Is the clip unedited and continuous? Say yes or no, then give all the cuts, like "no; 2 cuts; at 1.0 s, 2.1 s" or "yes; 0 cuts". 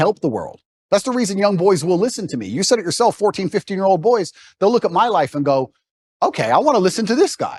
yes; 0 cuts